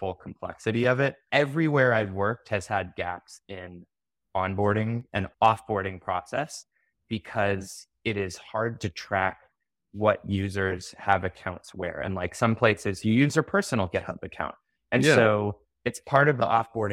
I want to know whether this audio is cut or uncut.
cut